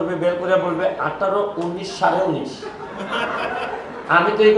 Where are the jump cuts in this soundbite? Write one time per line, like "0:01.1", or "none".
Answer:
none